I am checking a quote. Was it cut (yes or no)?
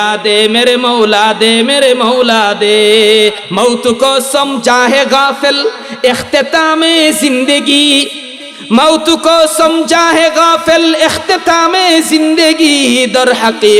yes